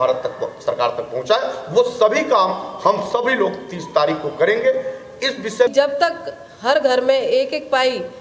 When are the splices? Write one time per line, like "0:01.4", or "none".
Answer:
0:05.7